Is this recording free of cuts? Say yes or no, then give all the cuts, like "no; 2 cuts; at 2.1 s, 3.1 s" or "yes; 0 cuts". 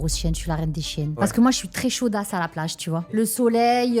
no; 2 cuts; at 1.2 s, 3.1 s